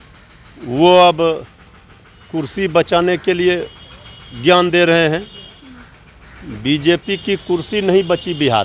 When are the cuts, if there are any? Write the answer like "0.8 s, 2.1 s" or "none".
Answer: none

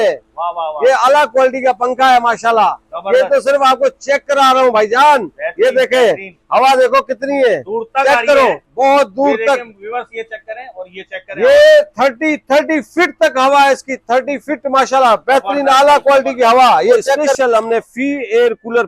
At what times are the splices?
17.3 s

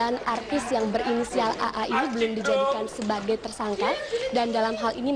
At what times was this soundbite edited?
2.8 s

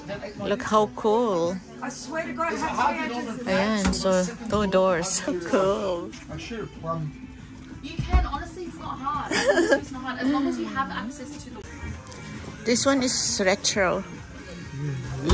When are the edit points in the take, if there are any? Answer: 5.3 s, 11.6 s

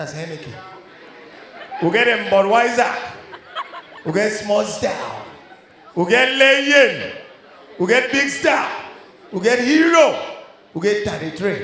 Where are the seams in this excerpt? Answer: none

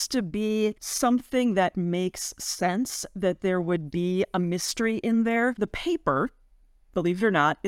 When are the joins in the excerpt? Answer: 0.9 s, 5.6 s

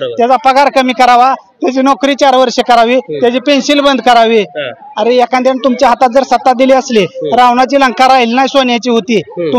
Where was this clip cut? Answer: none

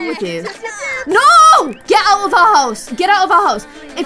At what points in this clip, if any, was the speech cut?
1.8 s

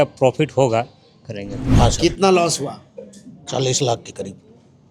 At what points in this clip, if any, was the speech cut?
1.6 s

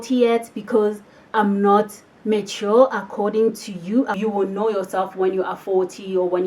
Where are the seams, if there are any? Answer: 4.1 s

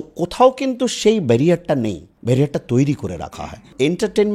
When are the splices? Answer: 2.1 s, 3.2 s

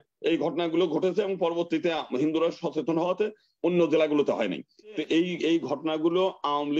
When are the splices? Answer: 5.0 s

